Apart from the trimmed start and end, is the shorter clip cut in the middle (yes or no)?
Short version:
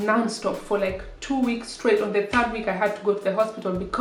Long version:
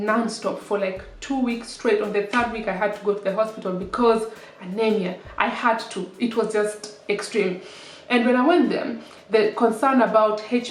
no